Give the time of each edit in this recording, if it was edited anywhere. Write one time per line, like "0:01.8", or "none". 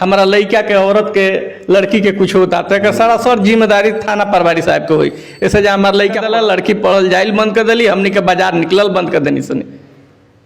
0:06.2